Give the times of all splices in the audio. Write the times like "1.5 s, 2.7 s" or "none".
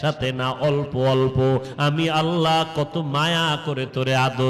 1.7 s